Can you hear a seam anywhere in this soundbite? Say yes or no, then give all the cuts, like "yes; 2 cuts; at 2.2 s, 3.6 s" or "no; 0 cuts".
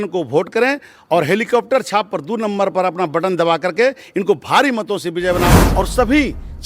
yes; 1 cut; at 5.5 s